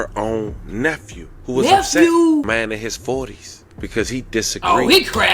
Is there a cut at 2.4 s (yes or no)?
yes